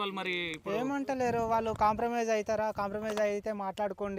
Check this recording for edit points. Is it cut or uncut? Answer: uncut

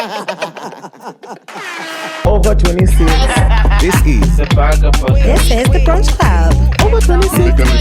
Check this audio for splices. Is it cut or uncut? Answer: cut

